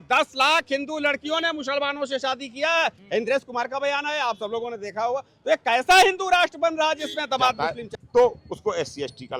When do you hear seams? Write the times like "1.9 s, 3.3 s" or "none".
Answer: 7.6 s